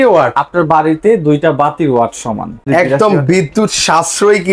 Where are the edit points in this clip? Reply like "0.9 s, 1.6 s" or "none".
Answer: 2.6 s